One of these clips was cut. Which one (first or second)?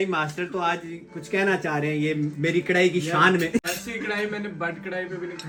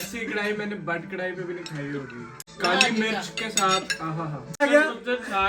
second